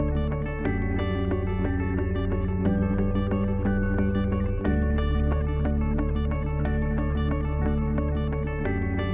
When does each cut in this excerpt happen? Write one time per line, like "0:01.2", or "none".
none